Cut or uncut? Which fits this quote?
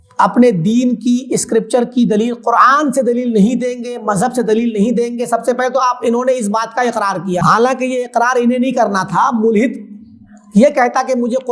cut